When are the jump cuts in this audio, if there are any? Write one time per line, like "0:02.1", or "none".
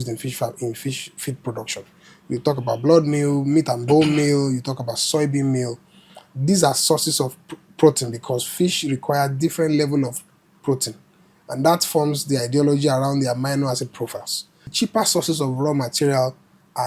0:14.7